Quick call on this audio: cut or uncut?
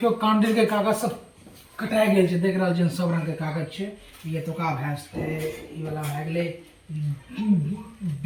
uncut